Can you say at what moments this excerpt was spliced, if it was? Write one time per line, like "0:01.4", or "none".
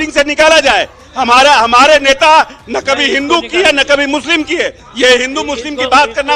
none